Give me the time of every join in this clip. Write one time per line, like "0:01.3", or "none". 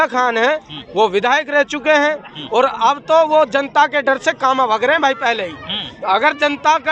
none